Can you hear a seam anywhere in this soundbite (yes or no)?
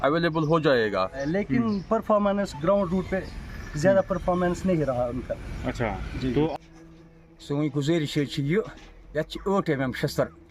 yes